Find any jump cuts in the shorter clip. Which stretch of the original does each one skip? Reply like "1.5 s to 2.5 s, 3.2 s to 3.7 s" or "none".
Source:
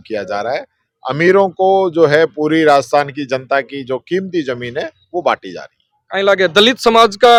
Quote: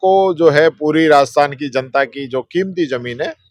none